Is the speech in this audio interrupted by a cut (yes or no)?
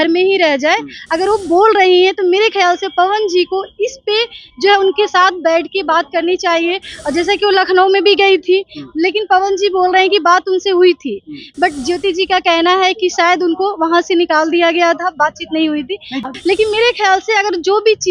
yes